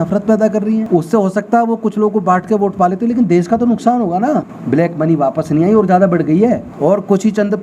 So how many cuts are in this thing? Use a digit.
3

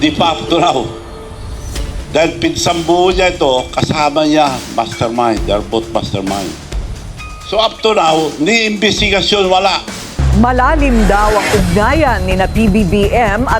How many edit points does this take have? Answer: 1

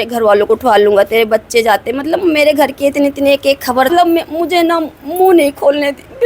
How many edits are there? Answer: 1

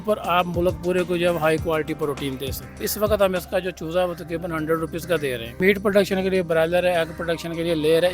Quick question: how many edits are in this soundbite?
2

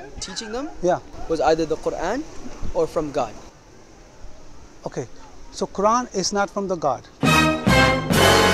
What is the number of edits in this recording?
1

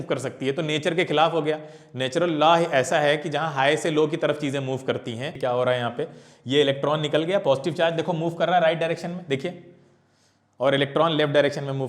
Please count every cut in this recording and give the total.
1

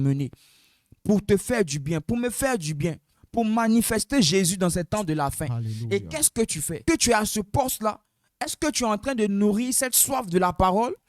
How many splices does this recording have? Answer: 1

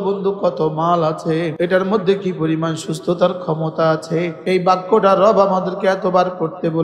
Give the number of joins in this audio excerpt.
2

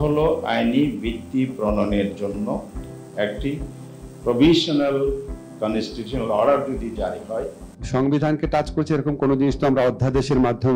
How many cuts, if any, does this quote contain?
1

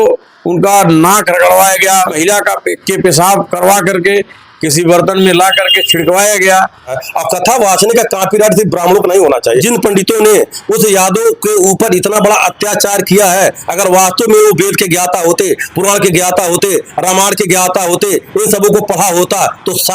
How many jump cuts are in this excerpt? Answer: 3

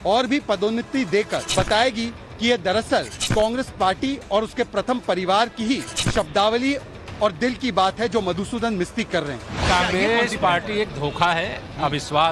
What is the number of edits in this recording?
4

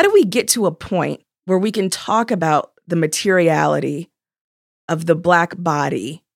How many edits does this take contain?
1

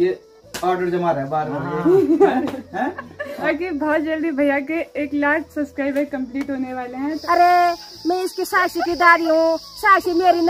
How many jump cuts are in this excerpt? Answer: 2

